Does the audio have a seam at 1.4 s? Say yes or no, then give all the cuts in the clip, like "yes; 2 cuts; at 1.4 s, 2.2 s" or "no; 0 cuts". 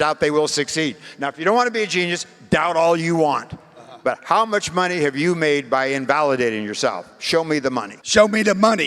no; 1 cut; at 8.0 s